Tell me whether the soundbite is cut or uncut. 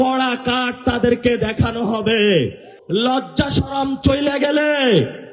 cut